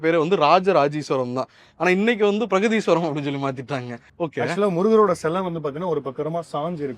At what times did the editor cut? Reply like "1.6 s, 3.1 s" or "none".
4.0 s